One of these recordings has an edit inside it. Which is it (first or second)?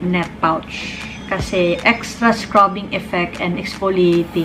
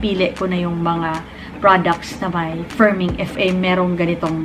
second